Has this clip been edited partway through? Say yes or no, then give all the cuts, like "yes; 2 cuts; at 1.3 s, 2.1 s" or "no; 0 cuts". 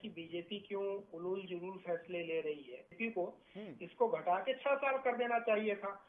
yes; 1 cut; at 2.9 s